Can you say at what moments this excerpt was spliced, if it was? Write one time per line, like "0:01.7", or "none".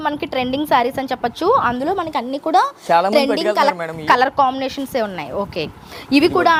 none